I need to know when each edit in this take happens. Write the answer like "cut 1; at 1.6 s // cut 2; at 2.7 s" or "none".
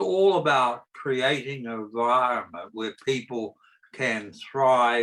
none